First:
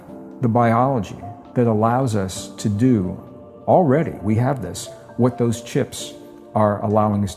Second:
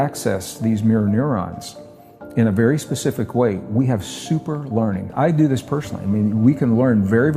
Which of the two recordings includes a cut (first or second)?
second